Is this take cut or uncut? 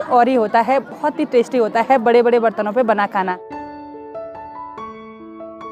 uncut